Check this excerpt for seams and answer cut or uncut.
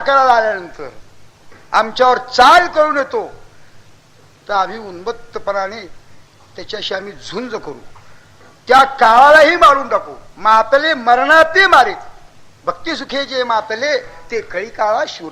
uncut